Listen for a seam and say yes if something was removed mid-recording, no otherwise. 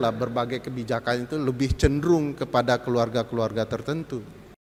no